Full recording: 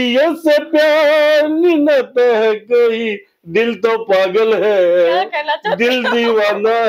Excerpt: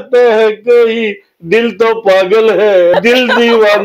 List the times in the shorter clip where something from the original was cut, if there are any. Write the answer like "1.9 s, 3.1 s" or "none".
2.9 s